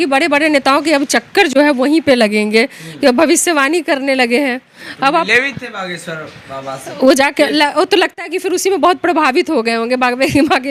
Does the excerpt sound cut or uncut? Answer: uncut